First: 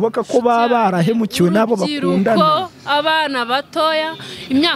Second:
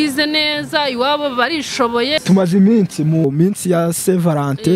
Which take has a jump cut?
second; 2 cuts; at 2.2 s, 3.2 s

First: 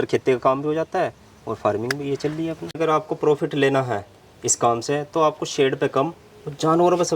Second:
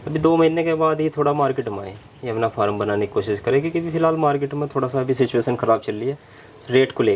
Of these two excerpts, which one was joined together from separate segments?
first; 1 cut; at 2.8 s

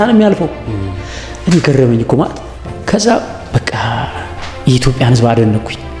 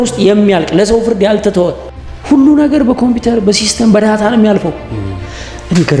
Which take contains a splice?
second; 1 cut; at 1.8 s

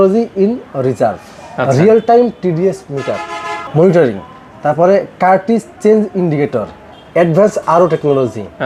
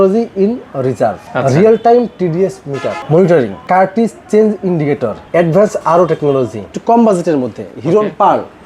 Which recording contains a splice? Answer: second; 5 cuts; at 1.2 s, 2.9 s, 3.6 s, 5.2 s, 6.7 s

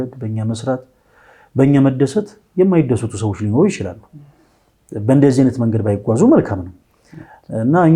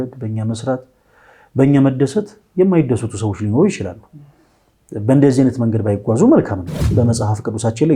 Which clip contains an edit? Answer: second; 1 cut; at 6.9 s

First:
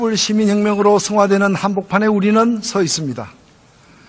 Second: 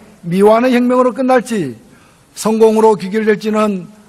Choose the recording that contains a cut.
first; 1 cut; at 2.2 s

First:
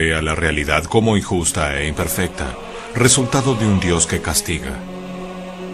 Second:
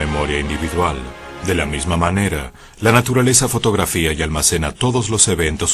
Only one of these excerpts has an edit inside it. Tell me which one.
first; 1 cut; at 3.5 s

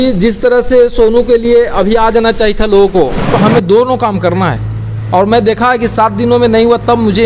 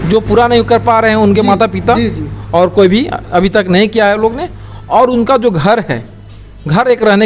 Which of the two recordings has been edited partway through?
first; 1 cut; at 3.3 s

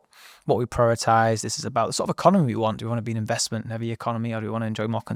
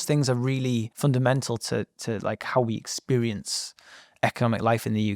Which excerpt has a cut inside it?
second; 1 cut; at 0.9 s

